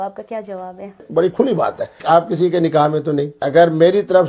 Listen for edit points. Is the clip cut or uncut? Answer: cut